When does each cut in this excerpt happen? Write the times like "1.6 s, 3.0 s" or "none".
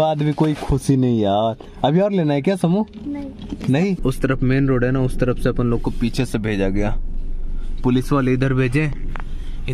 4.0 s